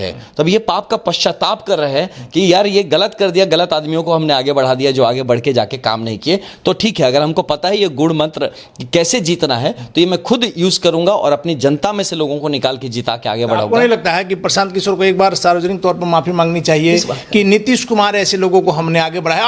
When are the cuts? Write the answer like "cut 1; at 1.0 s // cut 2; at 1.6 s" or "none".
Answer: none